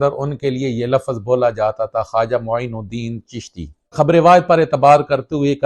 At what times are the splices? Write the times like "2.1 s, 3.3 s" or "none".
3.9 s